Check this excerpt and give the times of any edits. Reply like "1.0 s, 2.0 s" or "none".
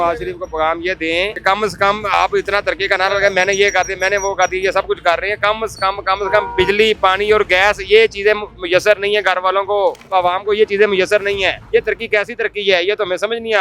1.3 s, 10.0 s, 11.6 s